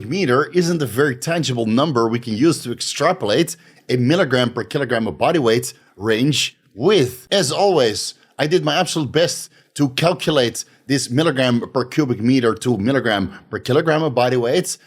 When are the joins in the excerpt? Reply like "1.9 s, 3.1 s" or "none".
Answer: 7.2 s